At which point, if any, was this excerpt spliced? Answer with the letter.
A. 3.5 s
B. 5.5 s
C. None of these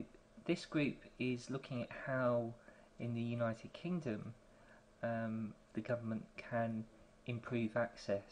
B